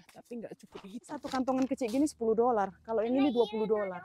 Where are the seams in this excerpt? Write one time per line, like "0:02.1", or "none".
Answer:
0:01.3

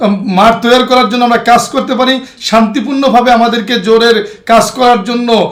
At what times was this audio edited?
none

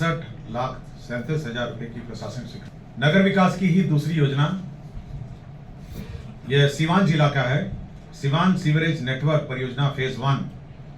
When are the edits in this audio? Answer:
0:02.6

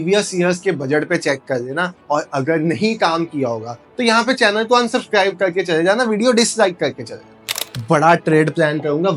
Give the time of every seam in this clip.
0:07.6

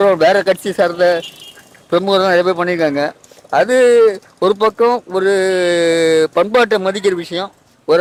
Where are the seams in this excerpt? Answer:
none

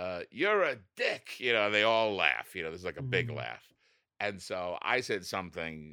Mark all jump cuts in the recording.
none

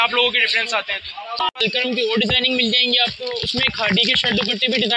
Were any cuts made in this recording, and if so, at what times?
0:01.6

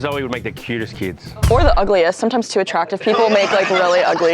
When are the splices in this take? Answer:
0:01.3

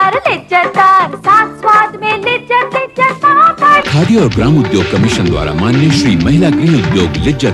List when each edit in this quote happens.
none

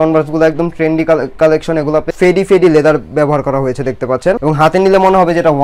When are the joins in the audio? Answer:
0:02.1

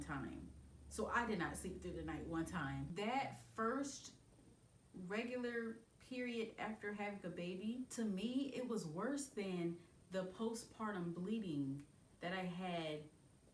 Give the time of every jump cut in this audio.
0:02.9

